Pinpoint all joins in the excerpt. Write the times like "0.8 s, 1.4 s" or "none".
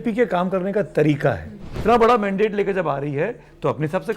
1.8 s